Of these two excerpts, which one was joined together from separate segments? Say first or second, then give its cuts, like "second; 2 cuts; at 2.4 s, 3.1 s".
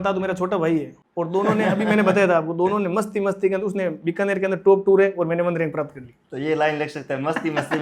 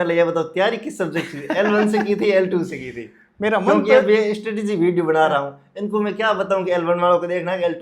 first; 1 cut; at 1.0 s